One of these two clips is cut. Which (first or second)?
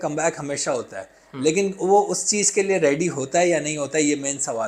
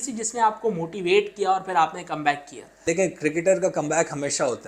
second